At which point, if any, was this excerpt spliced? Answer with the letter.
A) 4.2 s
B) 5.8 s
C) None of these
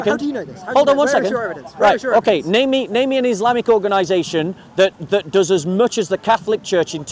C